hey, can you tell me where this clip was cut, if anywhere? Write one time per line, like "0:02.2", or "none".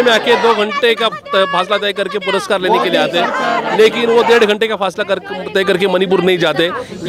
none